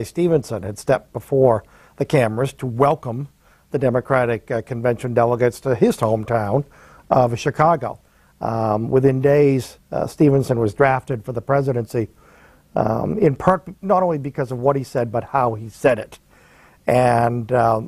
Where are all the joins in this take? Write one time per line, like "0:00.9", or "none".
none